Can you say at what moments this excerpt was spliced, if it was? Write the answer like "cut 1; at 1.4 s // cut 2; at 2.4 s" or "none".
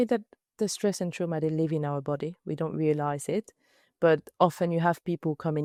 none